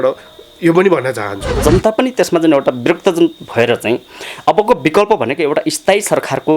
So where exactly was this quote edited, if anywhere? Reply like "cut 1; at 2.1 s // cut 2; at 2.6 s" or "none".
cut 1; at 1.6 s